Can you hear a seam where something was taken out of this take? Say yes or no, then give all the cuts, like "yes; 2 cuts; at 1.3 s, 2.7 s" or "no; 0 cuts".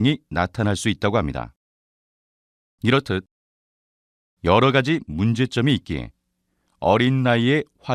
no; 0 cuts